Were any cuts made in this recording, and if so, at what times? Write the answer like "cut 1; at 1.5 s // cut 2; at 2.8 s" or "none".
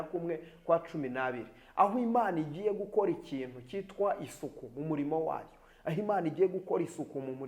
none